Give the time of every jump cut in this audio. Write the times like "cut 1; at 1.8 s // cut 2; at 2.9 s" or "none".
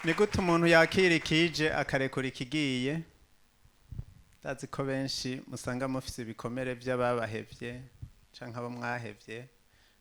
none